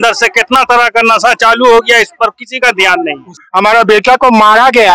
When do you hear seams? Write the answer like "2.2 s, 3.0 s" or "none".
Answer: 3.3 s

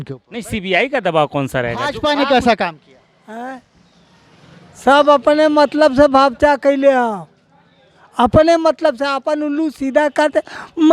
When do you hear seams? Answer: 1.9 s

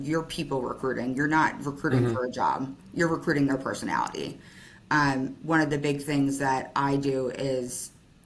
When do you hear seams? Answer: none

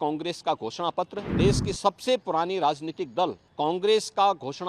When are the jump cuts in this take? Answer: 1.2 s, 3.4 s

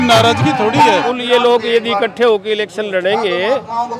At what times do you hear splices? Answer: 1.1 s

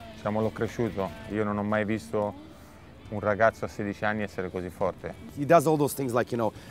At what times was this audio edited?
5.2 s

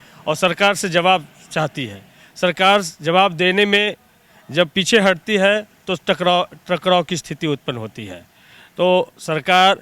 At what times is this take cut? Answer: none

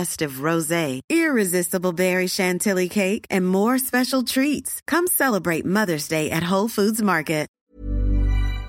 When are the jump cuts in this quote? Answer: 7.5 s

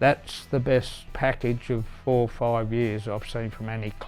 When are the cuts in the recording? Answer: 1.1 s

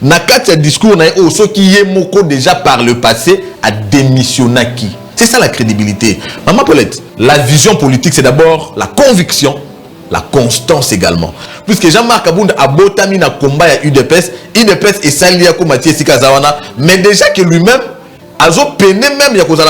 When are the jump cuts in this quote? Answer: 7.0 s, 11.4 s

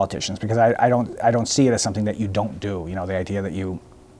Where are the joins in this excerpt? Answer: none

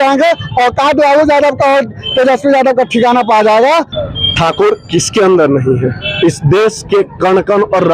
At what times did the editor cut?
3.9 s

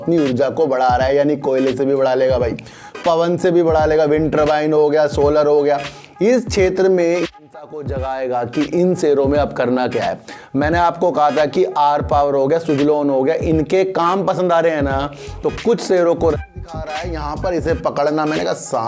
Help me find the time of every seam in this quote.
7.3 s, 16.3 s

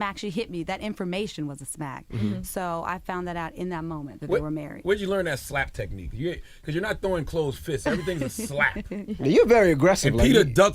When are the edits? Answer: 7.7 s

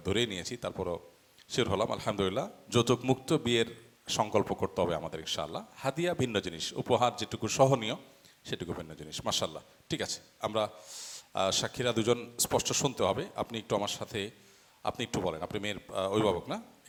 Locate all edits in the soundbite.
none

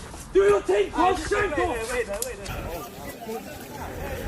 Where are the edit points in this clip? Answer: 2.4 s

